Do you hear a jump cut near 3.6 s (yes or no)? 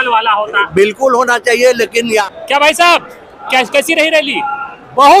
no